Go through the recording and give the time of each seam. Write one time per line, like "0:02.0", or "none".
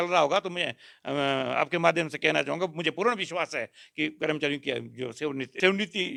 none

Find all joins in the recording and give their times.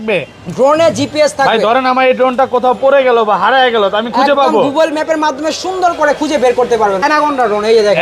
0:07.0

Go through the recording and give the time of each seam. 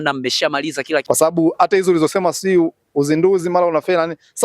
0:01.0

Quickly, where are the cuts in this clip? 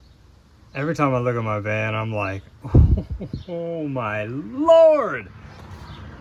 none

